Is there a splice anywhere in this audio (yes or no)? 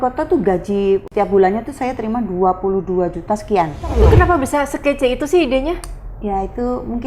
yes